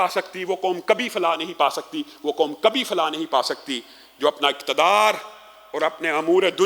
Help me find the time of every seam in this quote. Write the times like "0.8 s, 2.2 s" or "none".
none